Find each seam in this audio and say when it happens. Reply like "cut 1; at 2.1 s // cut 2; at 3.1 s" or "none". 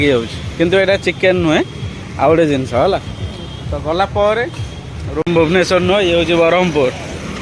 cut 1; at 5.3 s